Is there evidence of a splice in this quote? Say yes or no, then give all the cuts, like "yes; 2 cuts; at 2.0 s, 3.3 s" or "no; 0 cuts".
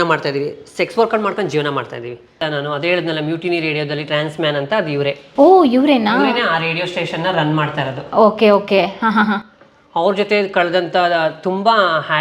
yes; 1 cut; at 2.3 s